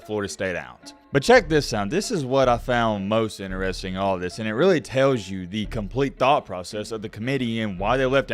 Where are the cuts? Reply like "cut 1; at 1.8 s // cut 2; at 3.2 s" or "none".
cut 1; at 0.9 s